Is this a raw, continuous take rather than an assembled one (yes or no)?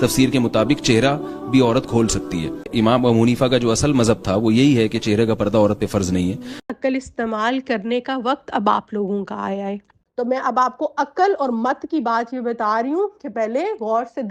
no